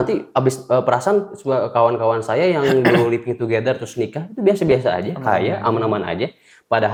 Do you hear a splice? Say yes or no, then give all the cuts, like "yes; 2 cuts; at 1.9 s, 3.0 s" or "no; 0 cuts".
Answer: no; 0 cuts